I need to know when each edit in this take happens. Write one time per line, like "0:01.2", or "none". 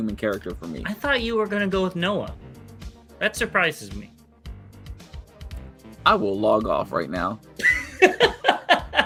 none